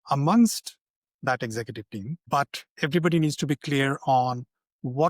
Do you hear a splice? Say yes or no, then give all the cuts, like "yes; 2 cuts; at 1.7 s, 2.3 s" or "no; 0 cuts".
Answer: yes; 1 cut; at 2.2 s